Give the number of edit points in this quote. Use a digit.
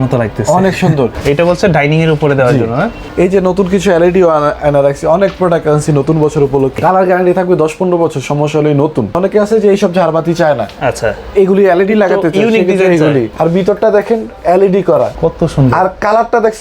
6